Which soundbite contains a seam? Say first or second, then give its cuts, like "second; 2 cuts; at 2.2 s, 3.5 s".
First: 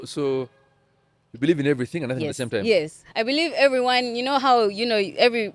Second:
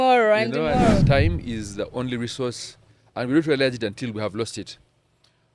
second; 1 cut; at 1.0 s